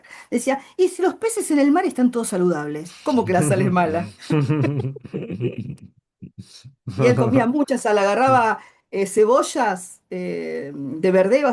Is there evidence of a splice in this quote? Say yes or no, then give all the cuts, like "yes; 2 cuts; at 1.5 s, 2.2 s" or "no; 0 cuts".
no; 0 cuts